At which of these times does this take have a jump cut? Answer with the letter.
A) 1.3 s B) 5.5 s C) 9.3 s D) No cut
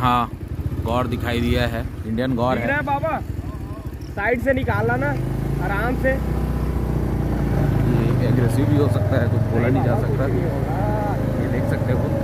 D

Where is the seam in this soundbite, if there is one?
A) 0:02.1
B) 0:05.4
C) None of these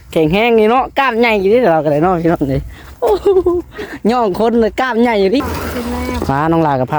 B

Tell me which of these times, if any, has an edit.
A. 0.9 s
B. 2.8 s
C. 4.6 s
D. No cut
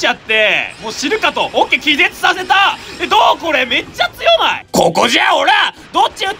C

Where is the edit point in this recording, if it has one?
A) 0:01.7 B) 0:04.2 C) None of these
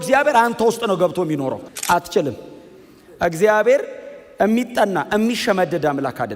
A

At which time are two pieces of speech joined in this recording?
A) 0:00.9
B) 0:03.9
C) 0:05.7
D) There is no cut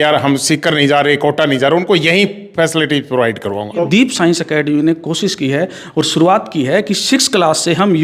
B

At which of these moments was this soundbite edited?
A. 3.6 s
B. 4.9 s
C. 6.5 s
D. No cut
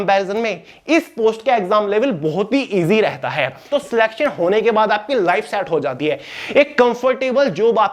A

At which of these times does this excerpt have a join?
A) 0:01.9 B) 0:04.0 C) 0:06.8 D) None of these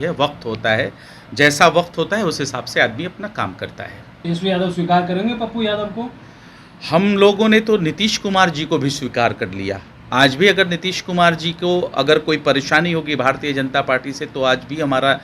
B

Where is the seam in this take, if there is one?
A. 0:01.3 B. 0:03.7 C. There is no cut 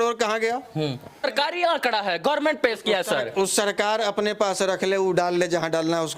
A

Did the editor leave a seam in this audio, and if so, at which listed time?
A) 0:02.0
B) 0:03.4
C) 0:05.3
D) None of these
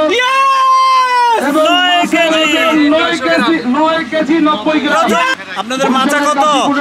C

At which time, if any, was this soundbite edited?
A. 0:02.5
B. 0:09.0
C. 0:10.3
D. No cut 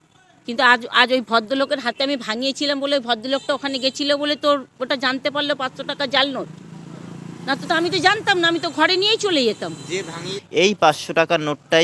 C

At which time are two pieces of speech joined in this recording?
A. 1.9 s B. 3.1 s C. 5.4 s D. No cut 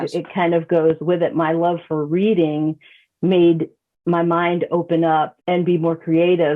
C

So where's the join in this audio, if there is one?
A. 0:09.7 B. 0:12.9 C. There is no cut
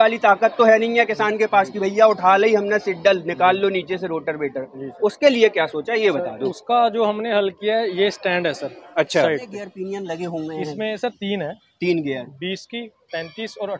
A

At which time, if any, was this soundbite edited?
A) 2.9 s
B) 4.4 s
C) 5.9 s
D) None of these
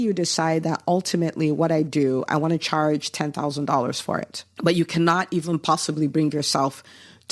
B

